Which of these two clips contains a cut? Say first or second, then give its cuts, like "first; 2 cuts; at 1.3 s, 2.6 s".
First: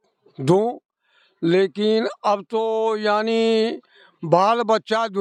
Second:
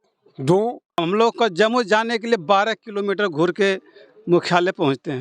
second; 1 cut; at 1.0 s